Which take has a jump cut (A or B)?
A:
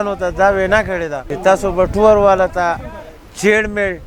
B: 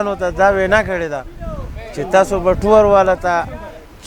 A